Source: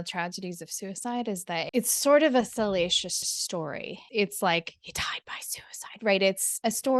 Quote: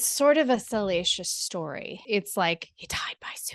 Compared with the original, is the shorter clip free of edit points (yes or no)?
no